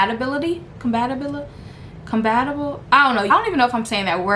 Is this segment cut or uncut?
cut